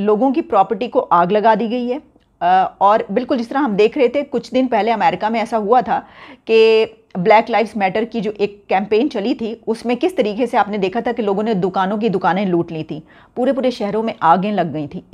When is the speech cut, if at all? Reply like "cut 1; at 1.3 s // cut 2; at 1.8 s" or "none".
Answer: none